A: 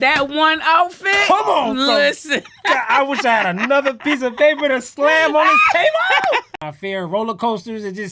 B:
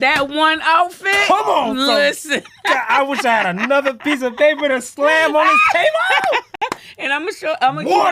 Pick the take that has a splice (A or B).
A